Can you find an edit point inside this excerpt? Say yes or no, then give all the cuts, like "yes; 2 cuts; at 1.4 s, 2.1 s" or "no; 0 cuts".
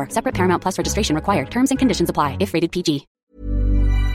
yes; 1 cut; at 3.1 s